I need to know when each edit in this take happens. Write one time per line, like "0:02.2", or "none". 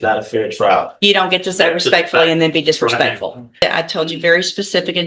0:03.6